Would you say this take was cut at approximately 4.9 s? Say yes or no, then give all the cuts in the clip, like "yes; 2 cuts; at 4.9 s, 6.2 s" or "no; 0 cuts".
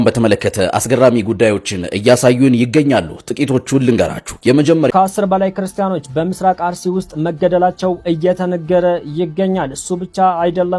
yes; 1 cut; at 4.9 s